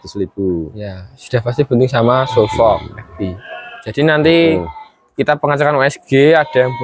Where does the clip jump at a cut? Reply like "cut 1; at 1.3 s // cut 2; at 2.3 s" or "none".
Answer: cut 1; at 3.8 s